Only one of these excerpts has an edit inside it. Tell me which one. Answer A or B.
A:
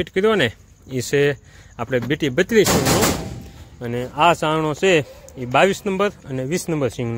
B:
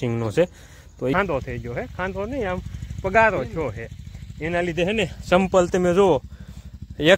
B